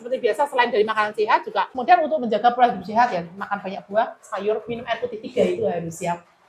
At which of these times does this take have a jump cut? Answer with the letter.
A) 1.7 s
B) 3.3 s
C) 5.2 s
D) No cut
A